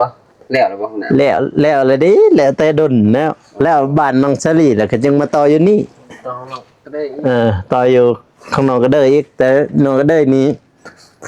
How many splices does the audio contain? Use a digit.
0